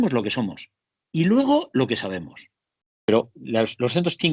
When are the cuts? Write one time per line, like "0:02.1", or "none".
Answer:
0:02.8